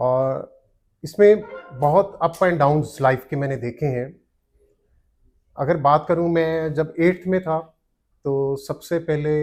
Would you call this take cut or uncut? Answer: uncut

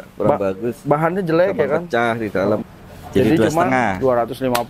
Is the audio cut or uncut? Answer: cut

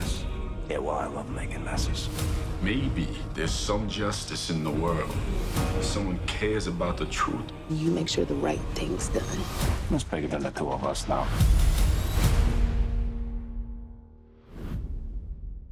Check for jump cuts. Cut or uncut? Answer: uncut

